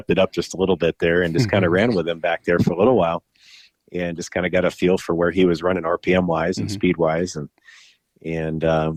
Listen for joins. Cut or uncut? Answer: uncut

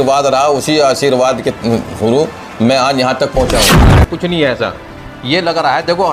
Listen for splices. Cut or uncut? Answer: cut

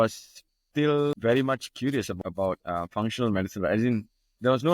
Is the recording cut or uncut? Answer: cut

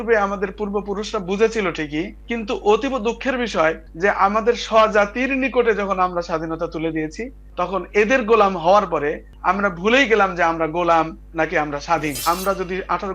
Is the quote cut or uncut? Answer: cut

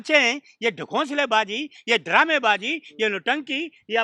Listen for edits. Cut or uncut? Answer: uncut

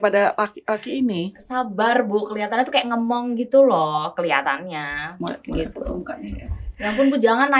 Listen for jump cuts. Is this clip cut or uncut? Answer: uncut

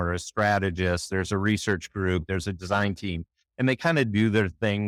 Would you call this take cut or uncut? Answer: uncut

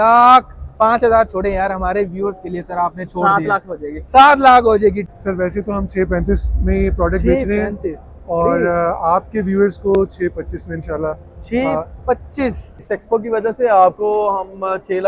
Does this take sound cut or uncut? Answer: cut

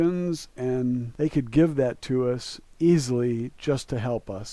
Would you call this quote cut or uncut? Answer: cut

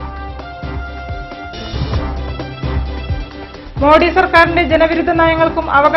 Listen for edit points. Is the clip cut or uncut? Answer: cut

